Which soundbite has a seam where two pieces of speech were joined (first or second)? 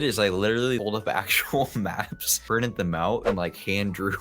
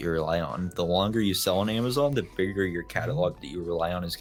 first